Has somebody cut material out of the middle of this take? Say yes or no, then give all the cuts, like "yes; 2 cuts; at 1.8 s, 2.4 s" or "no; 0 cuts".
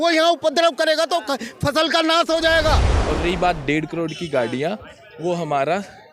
yes; 1 cut; at 3.0 s